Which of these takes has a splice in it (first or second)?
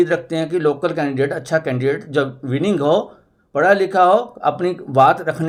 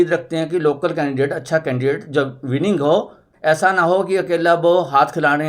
second